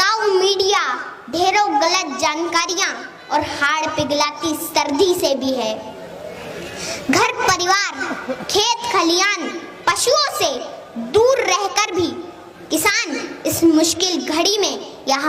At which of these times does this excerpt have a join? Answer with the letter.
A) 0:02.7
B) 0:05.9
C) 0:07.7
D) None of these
D